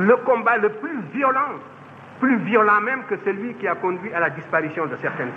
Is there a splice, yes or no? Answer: no